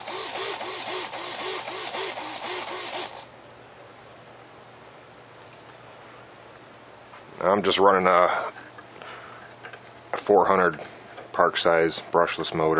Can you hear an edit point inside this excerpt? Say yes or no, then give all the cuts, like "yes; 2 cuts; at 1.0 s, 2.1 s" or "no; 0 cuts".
yes; 1 cut; at 8.6 s